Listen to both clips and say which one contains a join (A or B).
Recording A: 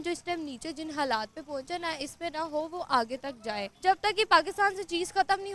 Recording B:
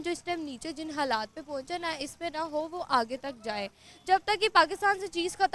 A